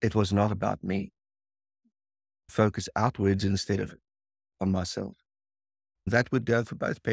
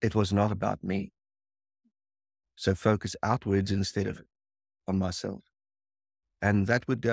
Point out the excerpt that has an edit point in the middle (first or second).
first